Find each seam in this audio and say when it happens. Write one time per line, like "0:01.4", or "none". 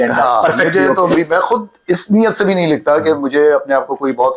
0:01.1